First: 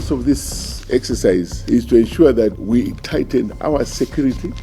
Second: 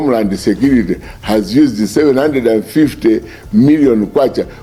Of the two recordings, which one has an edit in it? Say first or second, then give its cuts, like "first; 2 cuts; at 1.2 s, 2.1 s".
first; 2 cuts; at 1.6 s, 2.6 s